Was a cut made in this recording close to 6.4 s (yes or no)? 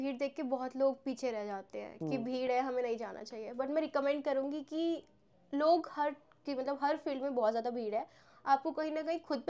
no